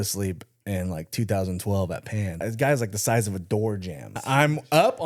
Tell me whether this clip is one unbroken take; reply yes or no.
no